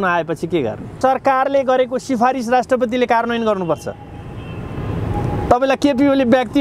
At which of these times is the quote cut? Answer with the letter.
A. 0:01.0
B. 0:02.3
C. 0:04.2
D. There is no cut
A